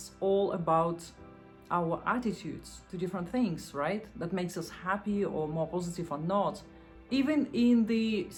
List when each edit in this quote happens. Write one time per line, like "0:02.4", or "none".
none